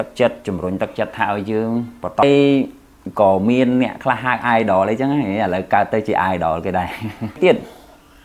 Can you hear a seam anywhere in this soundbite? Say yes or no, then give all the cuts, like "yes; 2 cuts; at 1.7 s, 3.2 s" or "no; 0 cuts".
yes; 2 cuts; at 2.2 s, 7.4 s